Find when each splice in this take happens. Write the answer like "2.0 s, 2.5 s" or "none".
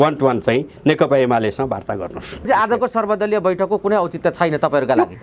2.5 s

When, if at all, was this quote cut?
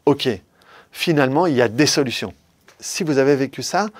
2.7 s

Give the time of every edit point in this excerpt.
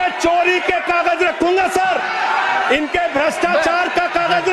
none

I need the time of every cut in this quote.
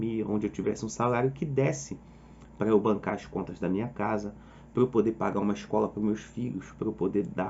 none

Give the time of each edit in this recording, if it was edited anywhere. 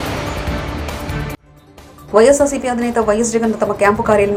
none

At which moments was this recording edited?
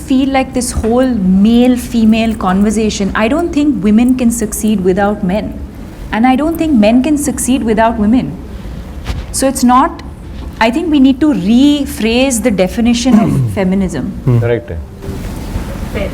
none

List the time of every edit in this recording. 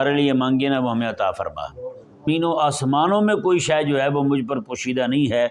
2.3 s

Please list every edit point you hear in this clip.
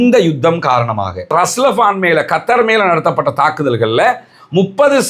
1.3 s

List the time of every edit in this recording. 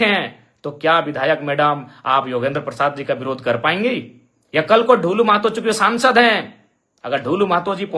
none

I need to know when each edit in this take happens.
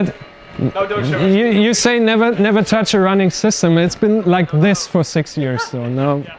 none

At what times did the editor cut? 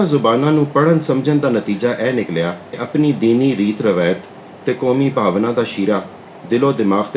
2.8 s

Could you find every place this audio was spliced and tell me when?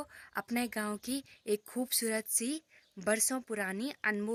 none

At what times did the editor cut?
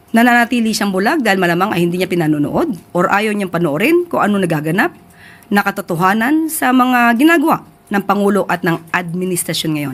none

